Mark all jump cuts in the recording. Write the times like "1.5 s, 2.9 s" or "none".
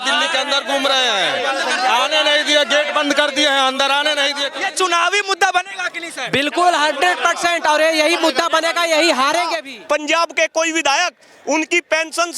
4.4 s, 9.7 s

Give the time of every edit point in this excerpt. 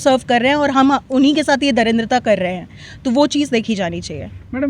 none

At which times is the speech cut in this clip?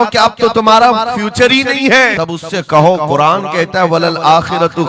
2.1 s

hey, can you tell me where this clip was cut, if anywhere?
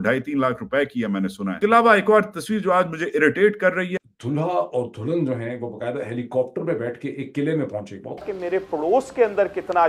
none

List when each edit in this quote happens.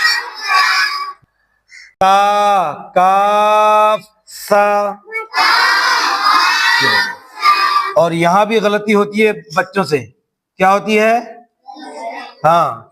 1.1 s, 7.9 s

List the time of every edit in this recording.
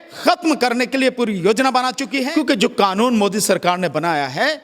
2.2 s

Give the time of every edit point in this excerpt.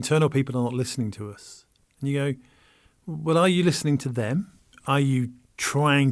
4.7 s

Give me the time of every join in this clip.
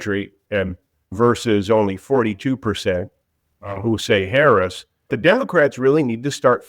1.1 s, 5.1 s

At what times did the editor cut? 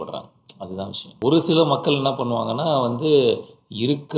1.0 s

